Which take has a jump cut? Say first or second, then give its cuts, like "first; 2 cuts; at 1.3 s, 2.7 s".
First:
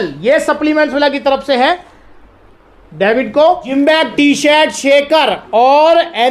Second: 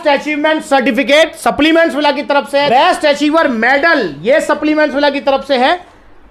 second; 1 cut; at 2.7 s